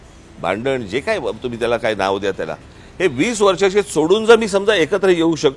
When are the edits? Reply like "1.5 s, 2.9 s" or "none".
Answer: none